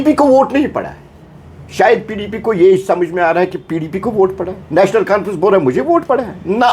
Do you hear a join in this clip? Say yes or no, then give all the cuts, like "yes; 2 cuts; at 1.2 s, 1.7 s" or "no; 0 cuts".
no; 0 cuts